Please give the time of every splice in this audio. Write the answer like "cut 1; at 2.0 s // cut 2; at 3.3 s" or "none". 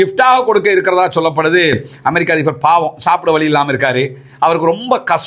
none